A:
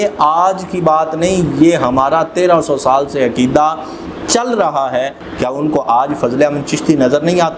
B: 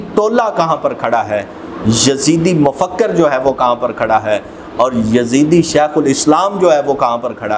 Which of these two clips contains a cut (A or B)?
A